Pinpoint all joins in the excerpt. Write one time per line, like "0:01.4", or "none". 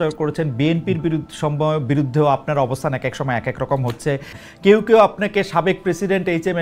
0:04.3